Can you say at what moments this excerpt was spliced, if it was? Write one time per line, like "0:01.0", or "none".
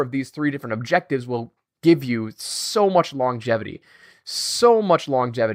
none